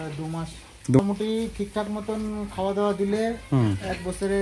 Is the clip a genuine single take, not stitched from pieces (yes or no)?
no